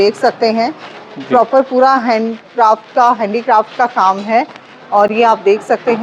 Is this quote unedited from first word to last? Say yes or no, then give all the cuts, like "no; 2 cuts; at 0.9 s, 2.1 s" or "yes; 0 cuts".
yes; 0 cuts